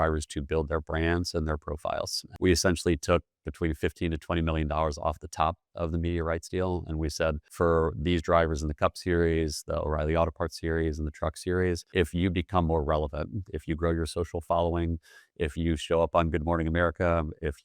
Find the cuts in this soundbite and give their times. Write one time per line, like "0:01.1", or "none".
0:02.2
0:07.4
0:11.8